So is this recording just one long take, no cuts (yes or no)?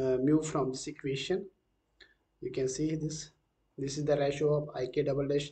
yes